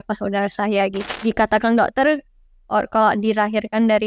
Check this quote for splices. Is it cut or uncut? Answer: cut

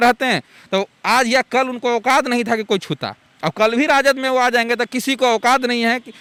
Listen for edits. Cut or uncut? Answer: uncut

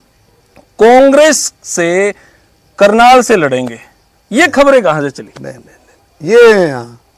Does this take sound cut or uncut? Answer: uncut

